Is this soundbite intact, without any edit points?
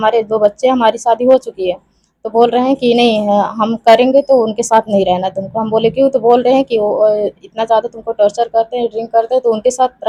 yes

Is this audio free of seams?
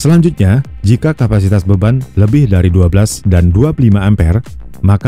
yes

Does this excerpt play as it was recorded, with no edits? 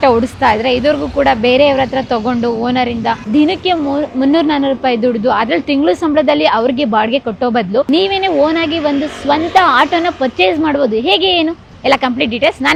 yes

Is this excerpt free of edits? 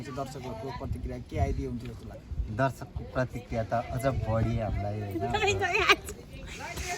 yes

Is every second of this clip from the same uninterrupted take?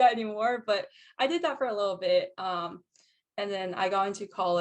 yes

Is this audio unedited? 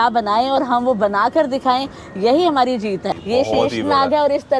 no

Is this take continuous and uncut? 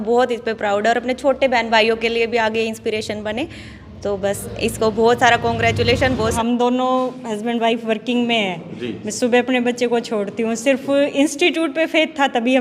no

